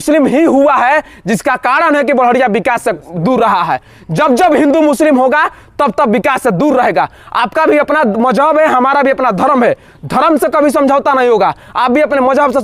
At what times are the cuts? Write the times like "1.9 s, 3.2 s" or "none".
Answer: none